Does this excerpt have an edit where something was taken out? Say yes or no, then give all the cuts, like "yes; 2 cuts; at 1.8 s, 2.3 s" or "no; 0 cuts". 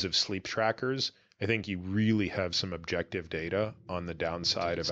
no; 0 cuts